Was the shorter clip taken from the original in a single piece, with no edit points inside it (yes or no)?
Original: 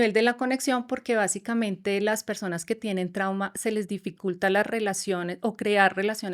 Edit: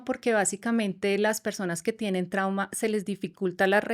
yes